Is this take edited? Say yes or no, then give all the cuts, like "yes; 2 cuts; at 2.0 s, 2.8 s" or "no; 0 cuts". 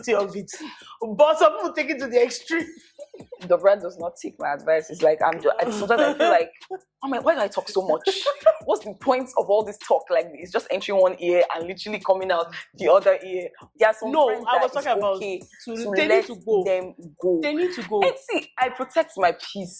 yes; 2 cuts; at 3.3 s, 13.6 s